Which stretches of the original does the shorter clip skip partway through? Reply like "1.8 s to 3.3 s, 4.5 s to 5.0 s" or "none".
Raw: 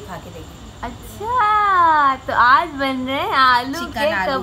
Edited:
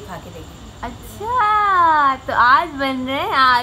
none